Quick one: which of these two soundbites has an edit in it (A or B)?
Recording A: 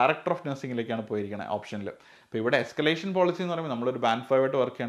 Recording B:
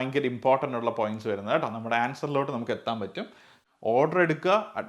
B